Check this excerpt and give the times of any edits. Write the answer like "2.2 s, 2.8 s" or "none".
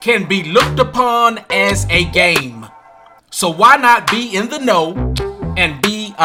none